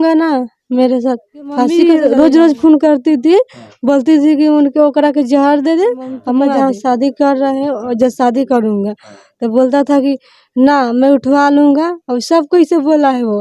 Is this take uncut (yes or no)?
no